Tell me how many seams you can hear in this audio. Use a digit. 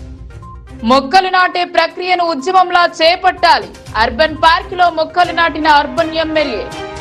0